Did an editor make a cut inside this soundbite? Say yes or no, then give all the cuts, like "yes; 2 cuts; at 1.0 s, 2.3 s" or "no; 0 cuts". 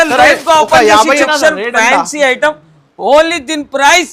yes; 1 cut; at 1.3 s